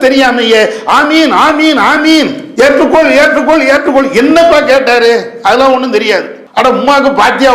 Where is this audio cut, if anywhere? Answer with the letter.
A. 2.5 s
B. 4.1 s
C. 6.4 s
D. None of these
C